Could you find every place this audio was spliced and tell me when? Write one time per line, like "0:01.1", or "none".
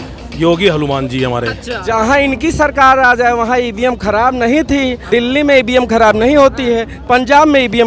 0:01.9
0:05.0